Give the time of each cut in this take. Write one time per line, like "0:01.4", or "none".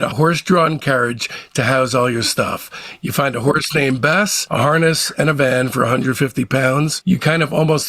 0:07.0